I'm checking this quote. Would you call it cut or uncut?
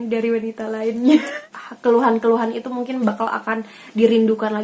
cut